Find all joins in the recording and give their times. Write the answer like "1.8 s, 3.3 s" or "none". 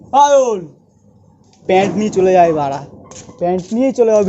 2.8 s

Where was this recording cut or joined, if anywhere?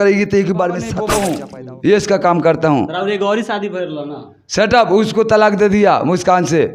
1.1 s

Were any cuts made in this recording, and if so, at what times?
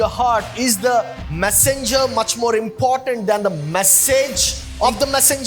none

